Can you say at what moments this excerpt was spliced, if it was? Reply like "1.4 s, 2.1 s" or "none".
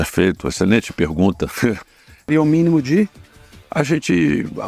2.3 s